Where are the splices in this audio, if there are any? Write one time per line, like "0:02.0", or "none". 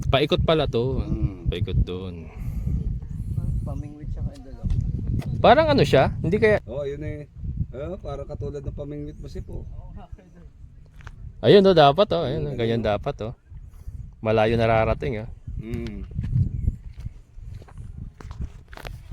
0:06.7